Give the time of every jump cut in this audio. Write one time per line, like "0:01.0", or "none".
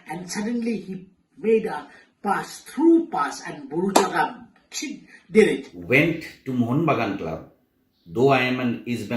0:05.7